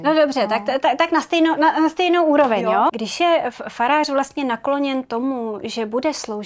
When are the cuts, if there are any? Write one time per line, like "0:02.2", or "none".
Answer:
0:02.8

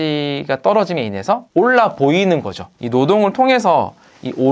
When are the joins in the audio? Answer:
0:02.8

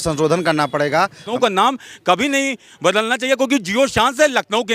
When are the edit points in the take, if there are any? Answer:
0:01.3

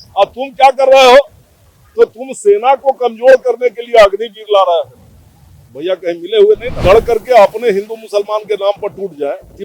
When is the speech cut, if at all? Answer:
0:06.8

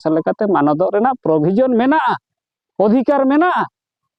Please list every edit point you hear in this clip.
none

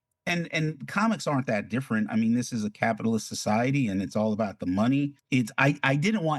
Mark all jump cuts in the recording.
0:05.2

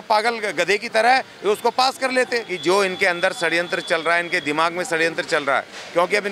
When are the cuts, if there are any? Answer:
0:02.5

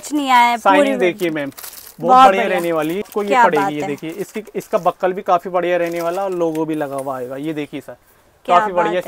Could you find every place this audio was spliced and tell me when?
0:03.1

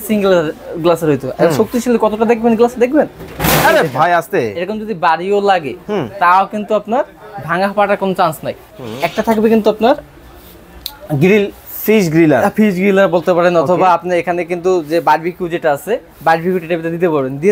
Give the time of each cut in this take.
0:08.7

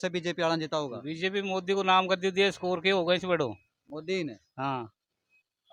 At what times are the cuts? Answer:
none

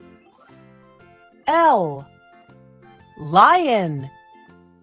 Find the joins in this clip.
0:01.2

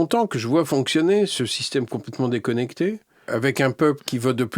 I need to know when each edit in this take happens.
0:03.2

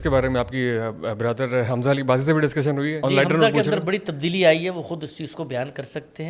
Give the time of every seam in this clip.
0:03.0

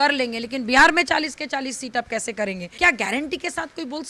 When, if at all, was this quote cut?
0:02.6

